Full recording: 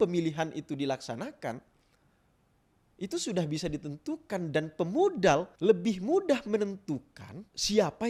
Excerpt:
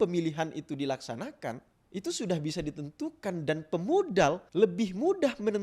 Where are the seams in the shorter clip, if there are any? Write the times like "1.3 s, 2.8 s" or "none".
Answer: 1.7 s